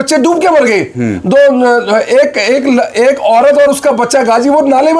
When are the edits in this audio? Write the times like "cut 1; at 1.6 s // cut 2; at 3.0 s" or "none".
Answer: none